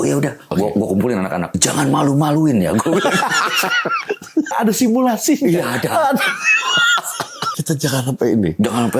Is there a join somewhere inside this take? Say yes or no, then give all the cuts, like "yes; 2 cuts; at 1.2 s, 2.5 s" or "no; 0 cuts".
yes; 3 cuts; at 1.6 s, 4.5 s, 7.6 s